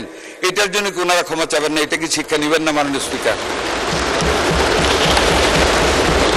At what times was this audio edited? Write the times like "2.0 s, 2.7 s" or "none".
none